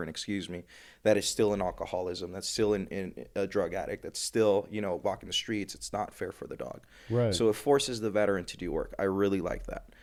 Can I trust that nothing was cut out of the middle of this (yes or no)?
yes